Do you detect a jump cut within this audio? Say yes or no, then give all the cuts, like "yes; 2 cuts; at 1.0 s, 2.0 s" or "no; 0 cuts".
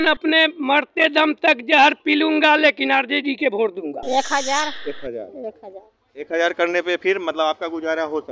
yes; 1 cut; at 4.0 s